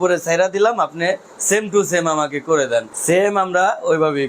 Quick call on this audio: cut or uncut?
cut